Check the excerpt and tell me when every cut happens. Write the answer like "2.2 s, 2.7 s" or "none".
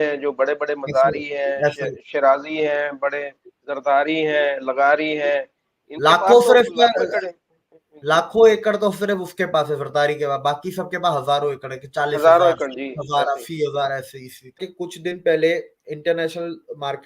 14.7 s